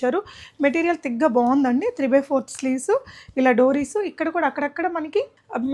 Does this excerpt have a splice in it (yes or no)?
no